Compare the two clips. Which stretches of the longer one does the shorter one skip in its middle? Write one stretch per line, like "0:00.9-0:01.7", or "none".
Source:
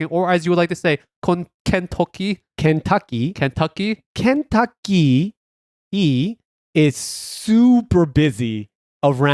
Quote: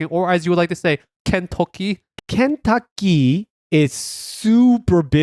0:01.1-0:01.5
0:02.5-0:04.0
0:05.4-0:06.6